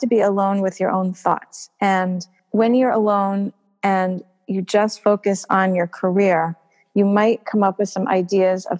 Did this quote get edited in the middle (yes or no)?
yes